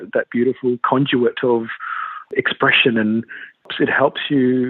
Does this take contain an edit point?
yes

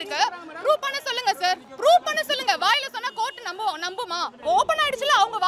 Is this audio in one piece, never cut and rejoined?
no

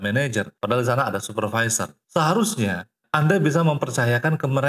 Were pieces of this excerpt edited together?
no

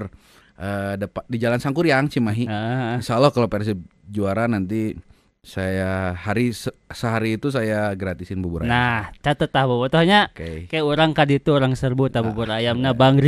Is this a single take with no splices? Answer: yes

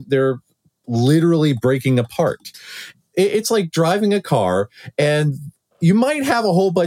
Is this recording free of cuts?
no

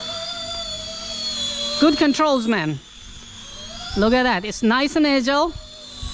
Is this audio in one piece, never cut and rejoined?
yes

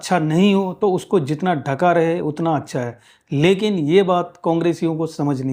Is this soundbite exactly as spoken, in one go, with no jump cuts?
yes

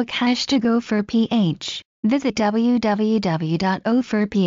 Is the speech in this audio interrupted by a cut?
yes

